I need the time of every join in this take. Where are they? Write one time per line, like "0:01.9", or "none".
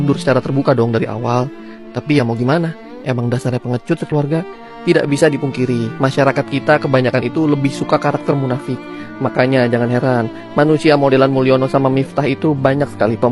none